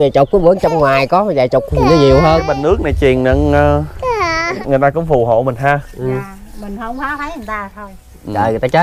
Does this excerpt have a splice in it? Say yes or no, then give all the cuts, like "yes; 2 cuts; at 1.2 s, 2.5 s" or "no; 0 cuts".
yes; 1 cut; at 4.6 s